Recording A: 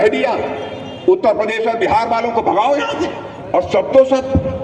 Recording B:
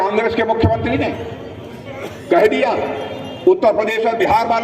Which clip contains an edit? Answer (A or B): A